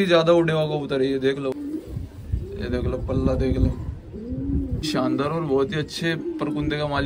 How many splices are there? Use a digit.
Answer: 2